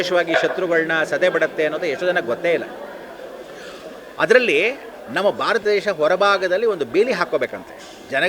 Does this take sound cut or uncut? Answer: uncut